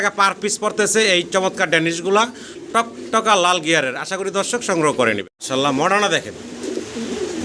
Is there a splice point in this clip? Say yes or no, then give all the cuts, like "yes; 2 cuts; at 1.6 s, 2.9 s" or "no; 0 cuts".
yes; 1 cut; at 5.3 s